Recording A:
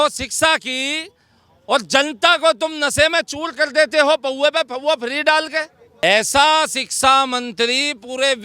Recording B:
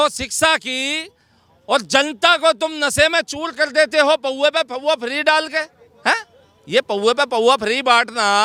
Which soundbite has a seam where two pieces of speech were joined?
A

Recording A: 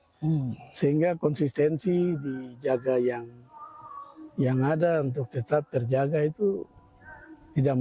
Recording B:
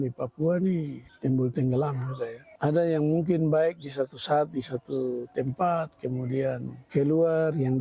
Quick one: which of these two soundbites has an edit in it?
B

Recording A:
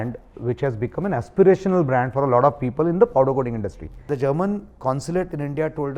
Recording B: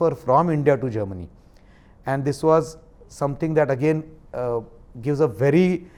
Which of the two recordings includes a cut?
A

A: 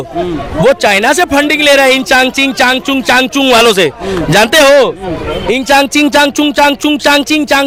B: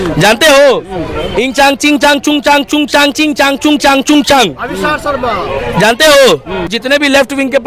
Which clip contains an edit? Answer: B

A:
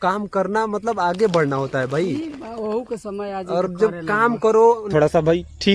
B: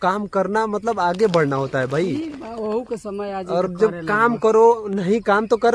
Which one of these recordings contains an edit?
A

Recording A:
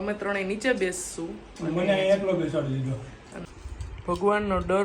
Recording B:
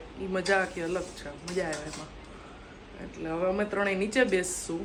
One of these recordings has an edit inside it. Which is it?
A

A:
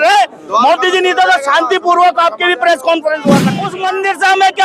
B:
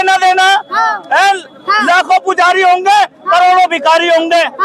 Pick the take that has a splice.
A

